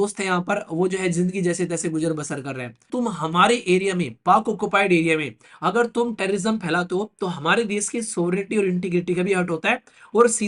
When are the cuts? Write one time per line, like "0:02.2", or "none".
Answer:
0:02.9